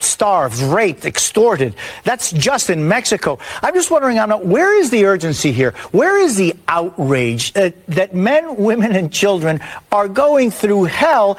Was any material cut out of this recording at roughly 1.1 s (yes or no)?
no